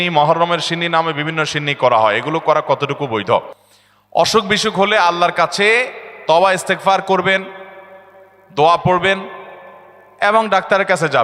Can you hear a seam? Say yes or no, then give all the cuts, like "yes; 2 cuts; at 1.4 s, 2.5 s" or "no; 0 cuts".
no; 0 cuts